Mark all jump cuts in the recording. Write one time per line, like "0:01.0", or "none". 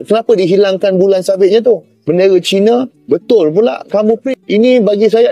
0:04.2